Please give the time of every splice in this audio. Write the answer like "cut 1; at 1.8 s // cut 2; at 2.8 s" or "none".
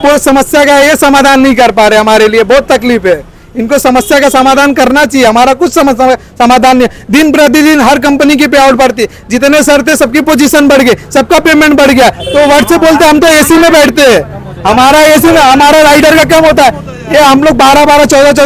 none

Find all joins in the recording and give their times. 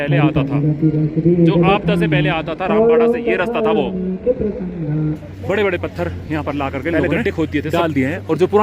cut 1; at 5.3 s

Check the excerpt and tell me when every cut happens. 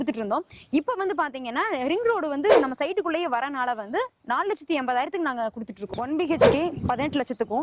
cut 1; at 5.8 s

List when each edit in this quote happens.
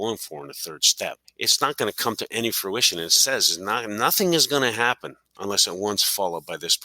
cut 1; at 1.3 s

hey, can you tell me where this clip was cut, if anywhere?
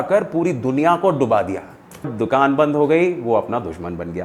cut 1; at 2.2 s

